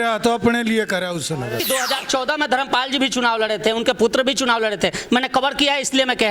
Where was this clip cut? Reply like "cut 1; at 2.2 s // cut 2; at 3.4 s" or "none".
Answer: cut 1; at 1.6 s